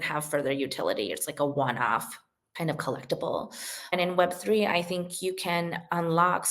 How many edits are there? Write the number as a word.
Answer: one